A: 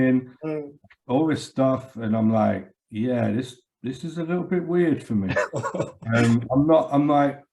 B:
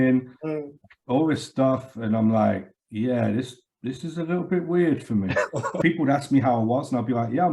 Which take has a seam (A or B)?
B